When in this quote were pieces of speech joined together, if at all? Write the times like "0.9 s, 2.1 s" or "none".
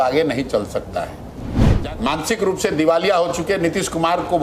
1.7 s